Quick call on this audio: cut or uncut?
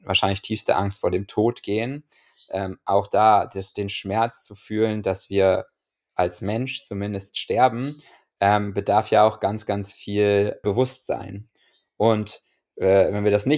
cut